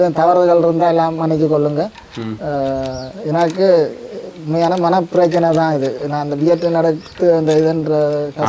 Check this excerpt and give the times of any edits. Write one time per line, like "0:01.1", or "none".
none